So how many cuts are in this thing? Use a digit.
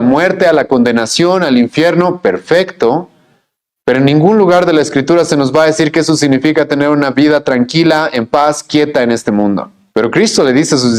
1